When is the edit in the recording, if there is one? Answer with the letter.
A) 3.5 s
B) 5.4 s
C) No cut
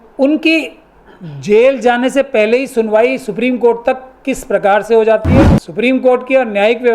B